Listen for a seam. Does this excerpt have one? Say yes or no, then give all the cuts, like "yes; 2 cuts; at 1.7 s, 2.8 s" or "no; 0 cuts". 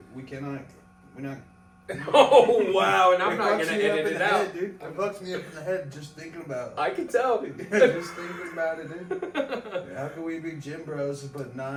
no; 0 cuts